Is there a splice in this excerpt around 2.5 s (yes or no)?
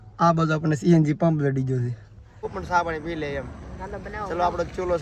yes